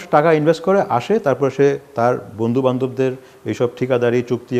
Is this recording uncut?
yes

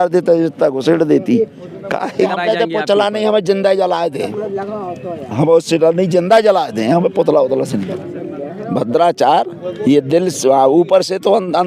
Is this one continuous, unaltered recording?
no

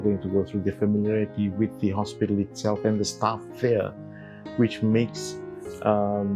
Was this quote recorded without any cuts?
yes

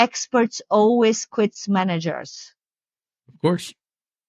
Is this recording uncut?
yes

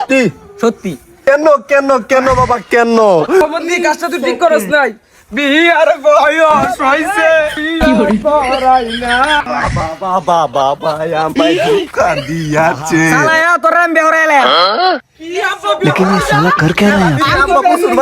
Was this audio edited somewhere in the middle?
yes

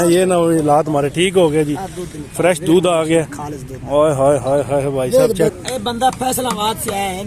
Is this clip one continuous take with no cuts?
no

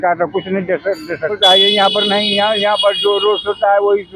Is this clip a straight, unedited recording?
no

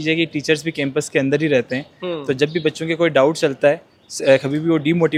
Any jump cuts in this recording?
no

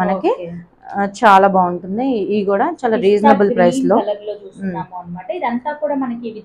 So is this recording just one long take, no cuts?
yes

